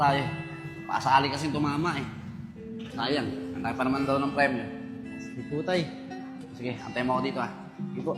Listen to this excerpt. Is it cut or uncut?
uncut